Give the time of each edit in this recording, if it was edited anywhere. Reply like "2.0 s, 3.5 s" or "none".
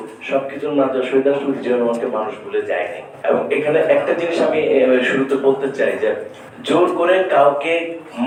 none